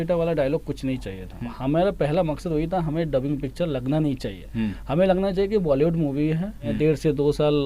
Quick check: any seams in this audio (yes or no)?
yes